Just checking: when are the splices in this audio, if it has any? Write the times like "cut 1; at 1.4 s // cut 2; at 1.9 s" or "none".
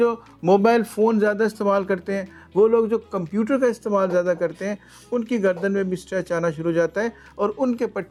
none

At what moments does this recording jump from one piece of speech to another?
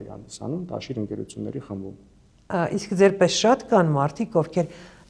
none

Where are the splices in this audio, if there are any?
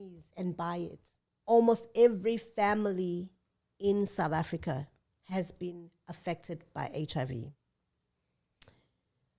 cut 1; at 1.1 s

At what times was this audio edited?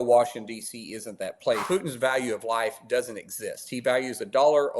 cut 1; at 1.6 s

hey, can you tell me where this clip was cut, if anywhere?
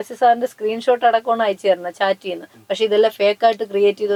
none

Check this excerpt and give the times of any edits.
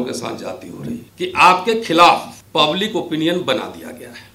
cut 1; at 1.1 s

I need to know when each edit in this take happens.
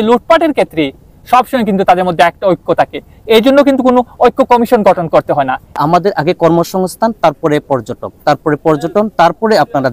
cut 1; at 5.8 s

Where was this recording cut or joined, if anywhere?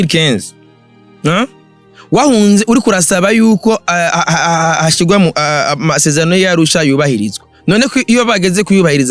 none

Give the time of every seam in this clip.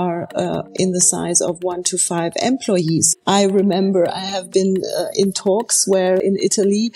cut 1; at 3.1 s // cut 2; at 6.2 s

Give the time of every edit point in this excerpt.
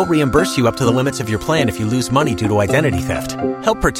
none

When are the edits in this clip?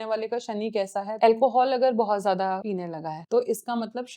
cut 1; at 1.1 s // cut 2; at 2.7 s

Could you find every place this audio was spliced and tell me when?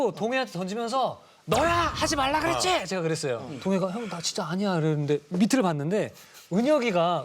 cut 1; at 3.5 s

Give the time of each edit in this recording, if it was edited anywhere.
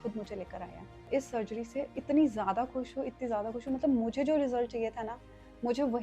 cut 1; at 1.1 s

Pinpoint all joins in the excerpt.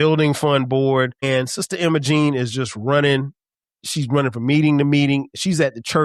cut 1; at 1.2 s

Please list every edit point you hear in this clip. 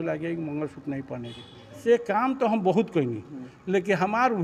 cut 1; at 1.8 s

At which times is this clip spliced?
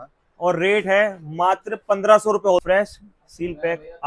cut 1; at 2.6 s

